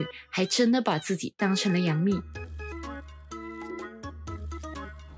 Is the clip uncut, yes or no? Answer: yes